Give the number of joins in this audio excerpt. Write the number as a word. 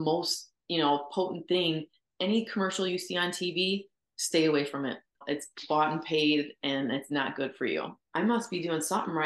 three